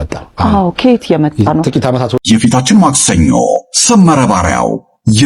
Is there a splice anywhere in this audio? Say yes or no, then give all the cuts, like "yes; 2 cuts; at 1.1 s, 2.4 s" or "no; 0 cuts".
yes; 1 cut; at 2.2 s